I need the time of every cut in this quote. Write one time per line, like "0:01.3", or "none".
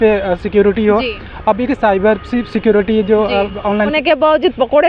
0:03.9

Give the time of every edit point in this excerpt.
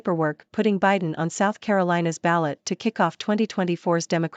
none

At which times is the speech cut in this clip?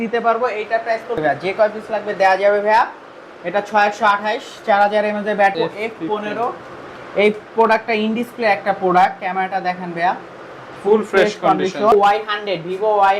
0:01.2
0:05.5
0:11.9

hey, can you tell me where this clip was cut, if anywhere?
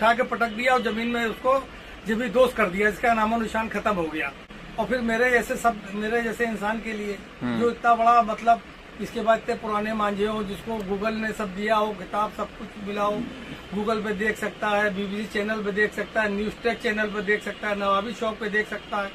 0:04.4

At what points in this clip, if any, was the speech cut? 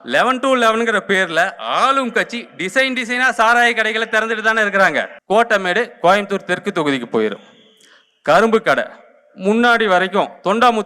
0:05.1

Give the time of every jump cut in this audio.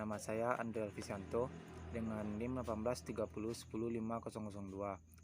0:02.9

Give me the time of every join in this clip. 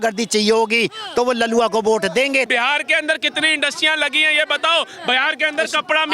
0:02.5

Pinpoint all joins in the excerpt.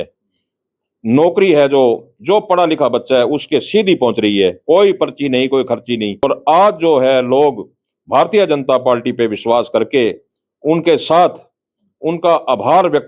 0:06.2

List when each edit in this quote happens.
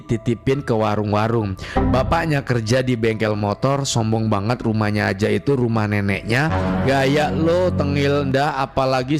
0:06.8

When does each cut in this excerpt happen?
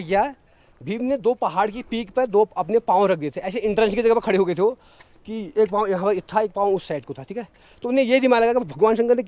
none

